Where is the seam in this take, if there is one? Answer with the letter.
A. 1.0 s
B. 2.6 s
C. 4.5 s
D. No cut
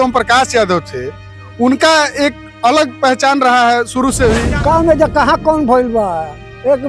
C